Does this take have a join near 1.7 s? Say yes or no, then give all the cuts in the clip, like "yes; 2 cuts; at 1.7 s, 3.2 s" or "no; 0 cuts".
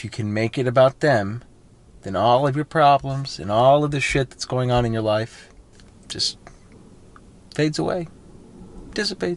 no; 1 cut; at 5.7 s